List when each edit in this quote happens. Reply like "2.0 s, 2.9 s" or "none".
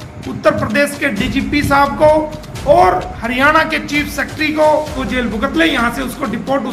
3.1 s, 5.0 s